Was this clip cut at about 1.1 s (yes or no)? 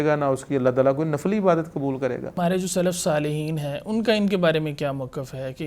no